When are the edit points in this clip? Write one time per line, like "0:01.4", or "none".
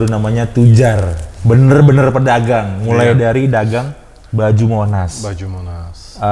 none